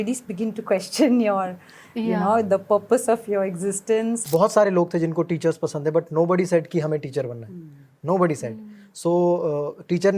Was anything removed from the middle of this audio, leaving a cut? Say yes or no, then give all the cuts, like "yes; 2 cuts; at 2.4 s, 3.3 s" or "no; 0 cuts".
yes; 1 cut; at 4.2 s